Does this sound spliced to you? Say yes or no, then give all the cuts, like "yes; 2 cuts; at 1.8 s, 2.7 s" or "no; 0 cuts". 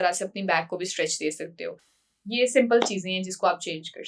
no; 0 cuts